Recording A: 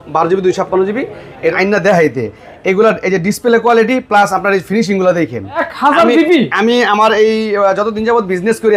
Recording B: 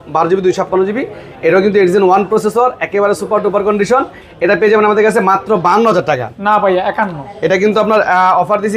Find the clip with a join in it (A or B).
A